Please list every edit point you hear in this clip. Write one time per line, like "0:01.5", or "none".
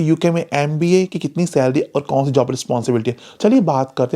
0:03.3

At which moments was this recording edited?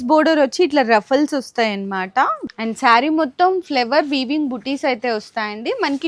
0:02.4

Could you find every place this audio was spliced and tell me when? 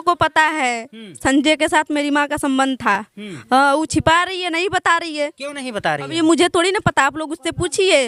none

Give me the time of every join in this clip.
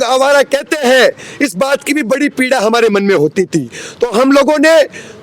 none

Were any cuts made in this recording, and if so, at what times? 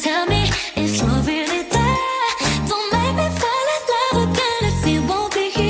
none

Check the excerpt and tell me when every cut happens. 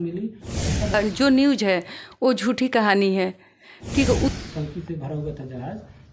0:00.9
0:04.3

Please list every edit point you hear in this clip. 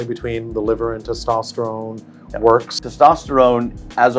0:02.9

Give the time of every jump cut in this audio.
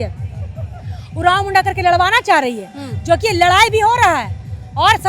none

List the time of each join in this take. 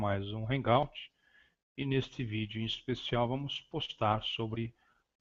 none

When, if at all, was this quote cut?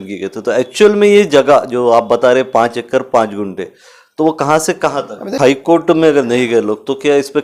0:05.4

